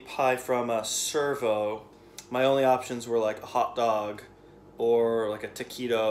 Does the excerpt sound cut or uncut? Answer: cut